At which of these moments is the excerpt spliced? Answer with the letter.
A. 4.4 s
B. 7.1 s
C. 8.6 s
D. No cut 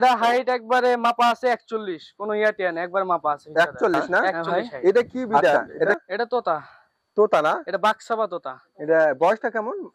A